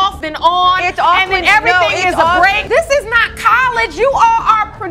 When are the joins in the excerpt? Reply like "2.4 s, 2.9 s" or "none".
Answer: 2.6 s

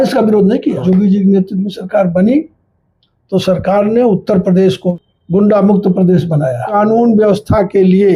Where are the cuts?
0.8 s, 4.9 s, 6.7 s

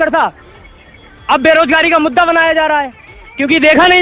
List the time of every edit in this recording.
none

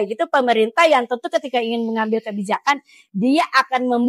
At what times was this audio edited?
none

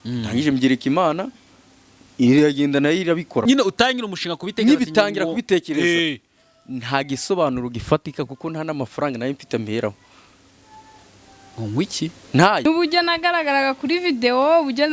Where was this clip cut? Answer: 3.4 s, 12.7 s

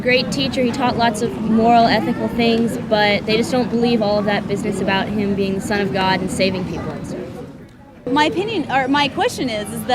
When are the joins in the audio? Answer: 8.1 s

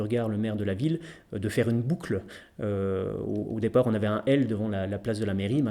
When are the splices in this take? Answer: none

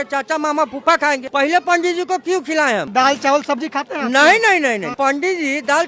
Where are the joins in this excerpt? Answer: 1.3 s, 2.9 s, 4.9 s

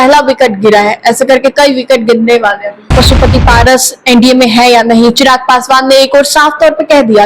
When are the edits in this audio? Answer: 3.0 s

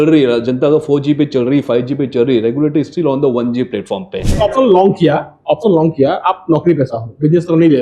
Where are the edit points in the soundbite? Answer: 4.4 s

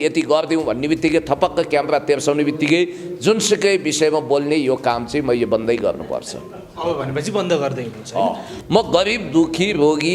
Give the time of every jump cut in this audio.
8.5 s

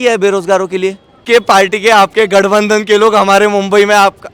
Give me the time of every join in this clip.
1.2 s

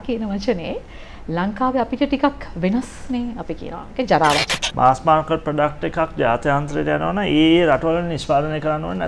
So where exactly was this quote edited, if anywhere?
4.6 s

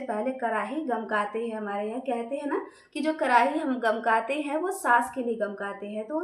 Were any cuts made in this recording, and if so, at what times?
none

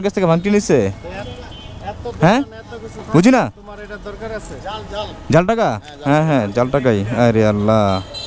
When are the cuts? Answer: none

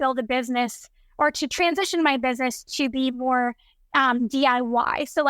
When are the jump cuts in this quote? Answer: none

